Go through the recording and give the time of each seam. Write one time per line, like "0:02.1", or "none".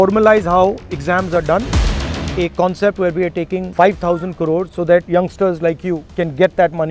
0:02.1
0:03.6
0:04.9
0:06.1